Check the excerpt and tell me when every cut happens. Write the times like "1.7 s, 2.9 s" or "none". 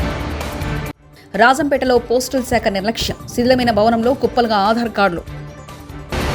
1.0 s